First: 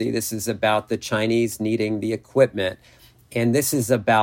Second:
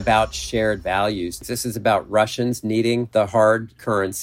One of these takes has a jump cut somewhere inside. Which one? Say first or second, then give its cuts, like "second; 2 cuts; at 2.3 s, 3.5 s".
second; 2 cuts; at 1.4 s, 3.1 s